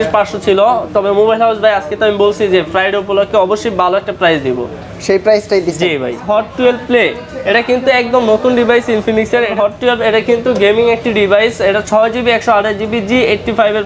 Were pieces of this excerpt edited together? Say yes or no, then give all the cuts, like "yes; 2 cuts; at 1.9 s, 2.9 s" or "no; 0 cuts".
yes; 2 cuts; at 6.2 s, 9.5 s